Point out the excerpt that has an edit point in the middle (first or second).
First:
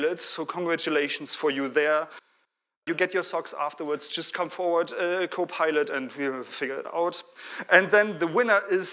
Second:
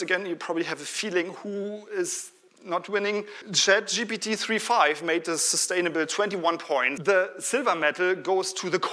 second